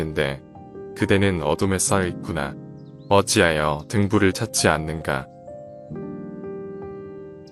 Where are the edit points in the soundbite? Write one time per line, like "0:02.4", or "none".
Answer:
0:05.6